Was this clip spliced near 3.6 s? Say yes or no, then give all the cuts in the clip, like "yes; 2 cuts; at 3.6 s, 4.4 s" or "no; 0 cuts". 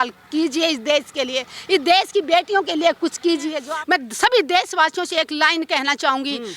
yes; 1 cut; at 3.6 s